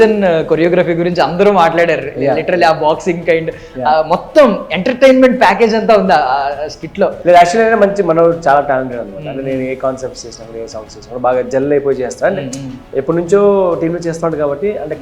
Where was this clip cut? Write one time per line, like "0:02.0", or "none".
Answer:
0:07.2